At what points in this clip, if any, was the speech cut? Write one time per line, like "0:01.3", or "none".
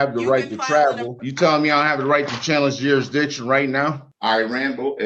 0:01.2
0:04.1